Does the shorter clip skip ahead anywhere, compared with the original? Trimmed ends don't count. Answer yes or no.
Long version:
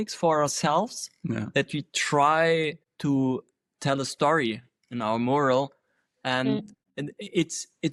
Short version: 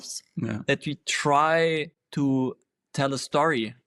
no